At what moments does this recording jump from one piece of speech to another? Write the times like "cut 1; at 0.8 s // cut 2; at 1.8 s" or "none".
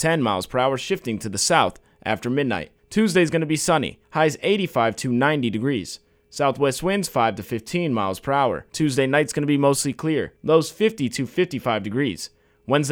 cut 1; at 2.7 s // cut 2; at 4.0 s // cut 3; at 8.7 s // cut 4; at 10.3 s